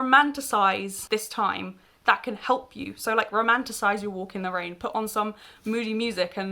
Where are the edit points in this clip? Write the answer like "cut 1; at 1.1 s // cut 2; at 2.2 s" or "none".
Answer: cut 1; at 0.9 s